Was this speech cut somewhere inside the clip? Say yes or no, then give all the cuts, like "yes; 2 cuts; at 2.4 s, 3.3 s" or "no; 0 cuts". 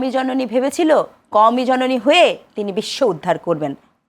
no; 0 cuts